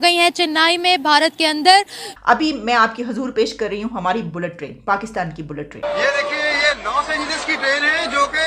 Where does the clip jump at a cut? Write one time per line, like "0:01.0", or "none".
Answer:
0:02.0
0:05.8